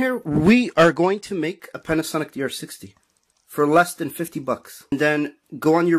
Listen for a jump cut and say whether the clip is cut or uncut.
cut